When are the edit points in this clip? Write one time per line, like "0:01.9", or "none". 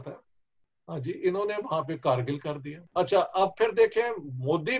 0:02.7